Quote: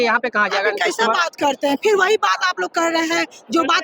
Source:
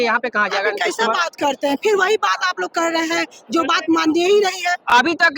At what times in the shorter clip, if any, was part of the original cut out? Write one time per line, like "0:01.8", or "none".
none